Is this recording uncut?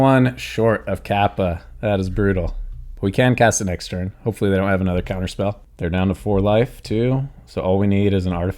no; 1 cut; at 5.7 s

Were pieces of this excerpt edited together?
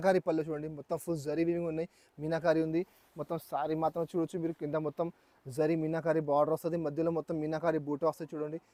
no; 0 cuts

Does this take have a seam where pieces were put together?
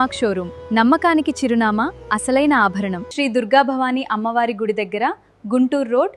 yes; 1 cut; at 3.0 s

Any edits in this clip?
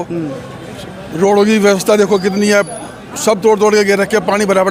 no; 0 cuts

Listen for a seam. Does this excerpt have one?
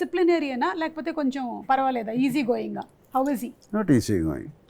no; 0 cuts

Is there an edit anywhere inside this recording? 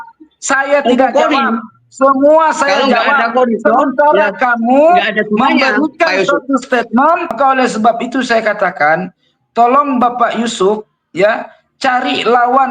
yes; 1 cut; at 7.4 s

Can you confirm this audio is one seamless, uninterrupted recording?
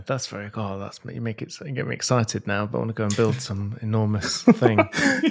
yes; 0 cuts

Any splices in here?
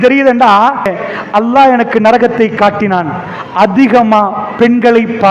yes; 1 cut; at 1.0 s

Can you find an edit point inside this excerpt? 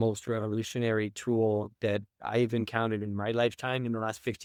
no; 0 cuts

